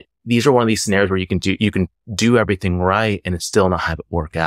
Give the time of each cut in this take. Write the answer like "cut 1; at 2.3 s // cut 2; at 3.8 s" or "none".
none